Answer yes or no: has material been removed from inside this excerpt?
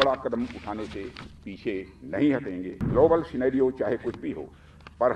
yes